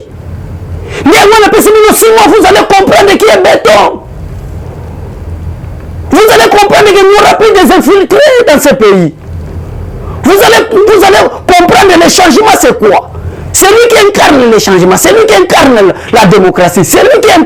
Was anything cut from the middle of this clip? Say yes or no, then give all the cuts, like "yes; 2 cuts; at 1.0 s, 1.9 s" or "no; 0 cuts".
no; 0 cuts